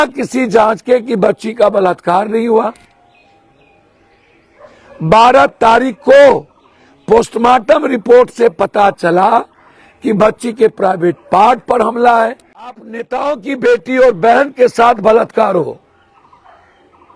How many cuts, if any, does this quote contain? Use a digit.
1